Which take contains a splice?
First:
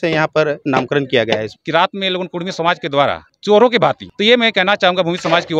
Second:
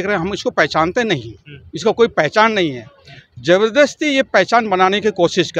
first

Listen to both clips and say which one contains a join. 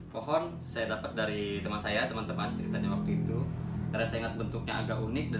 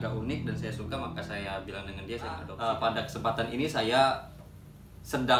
second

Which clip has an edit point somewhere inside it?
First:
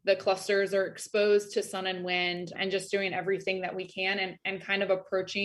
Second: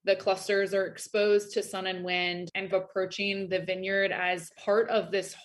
second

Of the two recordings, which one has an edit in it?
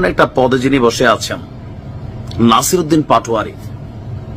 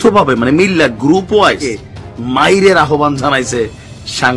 second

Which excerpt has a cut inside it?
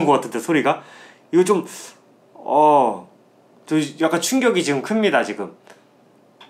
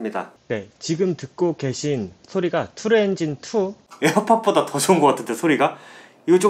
second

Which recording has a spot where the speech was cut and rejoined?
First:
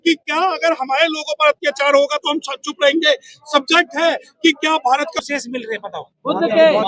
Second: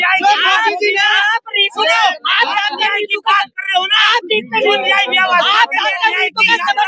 first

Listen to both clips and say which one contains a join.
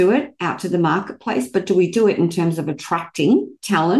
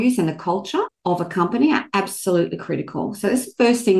second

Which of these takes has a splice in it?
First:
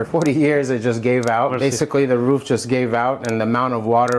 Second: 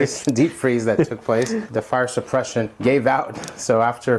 first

